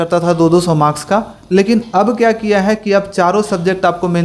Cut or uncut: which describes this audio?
uncut